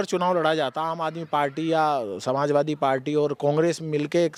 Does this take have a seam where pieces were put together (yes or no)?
no